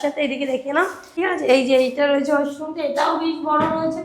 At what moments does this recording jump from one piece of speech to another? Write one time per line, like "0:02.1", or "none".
0:01.0